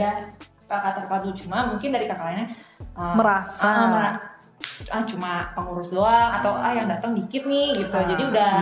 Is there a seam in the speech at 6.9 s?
no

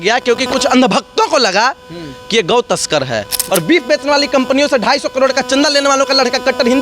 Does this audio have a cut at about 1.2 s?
no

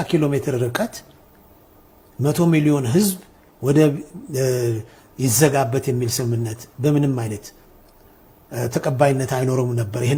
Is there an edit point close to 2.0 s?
no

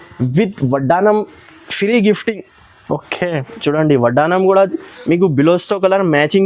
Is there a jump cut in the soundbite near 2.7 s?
no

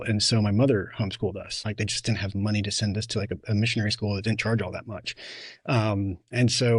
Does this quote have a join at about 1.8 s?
yes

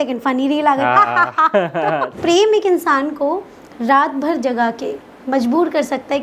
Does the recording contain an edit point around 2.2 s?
yes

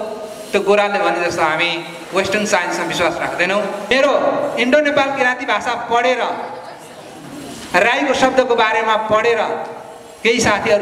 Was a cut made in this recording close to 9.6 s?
no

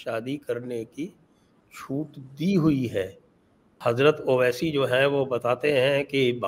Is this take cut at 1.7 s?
no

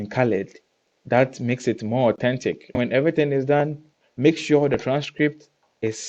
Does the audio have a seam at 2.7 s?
yes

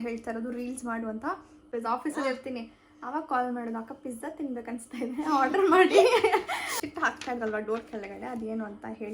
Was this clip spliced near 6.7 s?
yes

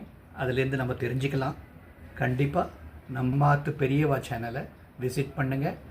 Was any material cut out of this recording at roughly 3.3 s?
yes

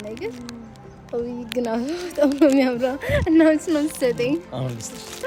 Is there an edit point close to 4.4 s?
no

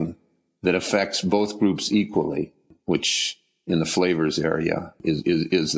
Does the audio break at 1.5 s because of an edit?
no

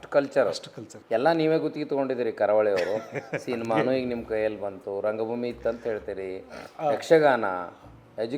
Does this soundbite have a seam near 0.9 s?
yes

